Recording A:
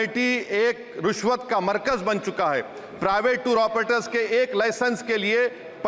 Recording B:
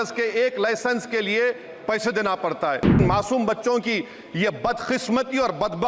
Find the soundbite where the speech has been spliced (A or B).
B